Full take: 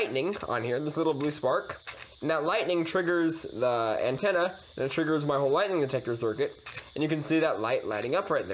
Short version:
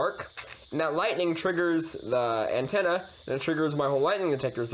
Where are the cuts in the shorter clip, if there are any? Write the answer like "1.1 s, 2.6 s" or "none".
none